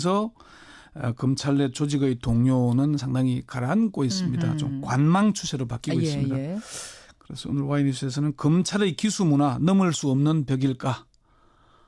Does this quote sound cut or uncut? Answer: cut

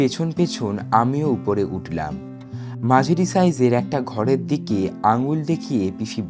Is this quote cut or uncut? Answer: uncut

